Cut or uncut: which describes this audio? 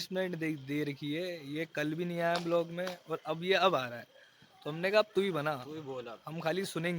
uncut